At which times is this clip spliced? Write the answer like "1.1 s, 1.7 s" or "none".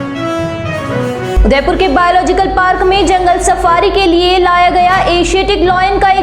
none

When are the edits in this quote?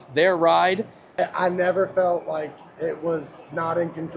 1.0 s

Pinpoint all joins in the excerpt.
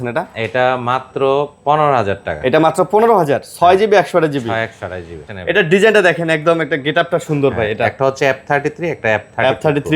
5.2 s

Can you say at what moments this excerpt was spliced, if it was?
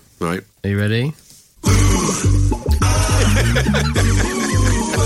none

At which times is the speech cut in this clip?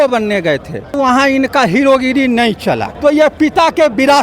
1.0 s, 2.9 s

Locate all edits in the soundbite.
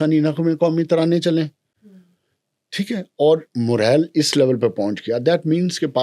none

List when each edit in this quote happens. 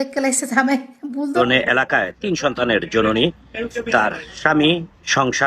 1.4 s

